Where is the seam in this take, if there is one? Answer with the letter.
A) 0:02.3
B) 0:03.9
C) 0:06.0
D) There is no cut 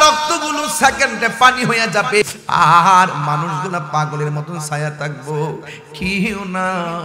A